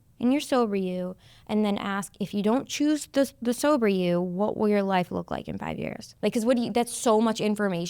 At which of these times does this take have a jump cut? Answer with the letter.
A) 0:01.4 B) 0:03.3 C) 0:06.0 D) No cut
C